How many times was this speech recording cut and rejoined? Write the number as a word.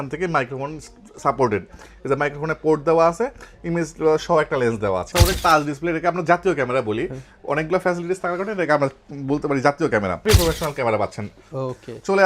two